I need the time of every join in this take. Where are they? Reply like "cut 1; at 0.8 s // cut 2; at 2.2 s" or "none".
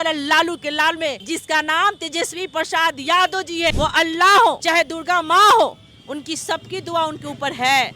cut 1; at 1.2 s // cut 2; at 3.7 s // cut 3; at 4.6 s